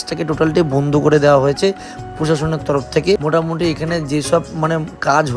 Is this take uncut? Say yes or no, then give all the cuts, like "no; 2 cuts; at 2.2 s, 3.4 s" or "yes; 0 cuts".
no; 1 cut; at 3.2 s